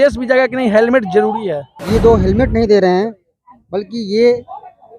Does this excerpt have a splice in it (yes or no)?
yes